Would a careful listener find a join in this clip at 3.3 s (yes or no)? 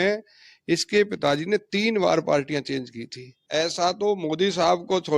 yes